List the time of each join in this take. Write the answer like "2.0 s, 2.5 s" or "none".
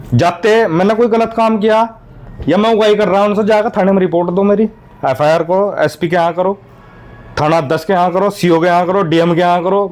none